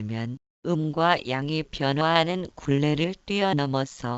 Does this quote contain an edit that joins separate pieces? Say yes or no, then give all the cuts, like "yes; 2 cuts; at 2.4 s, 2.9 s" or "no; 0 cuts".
yes; 1 cut; at 2.1 s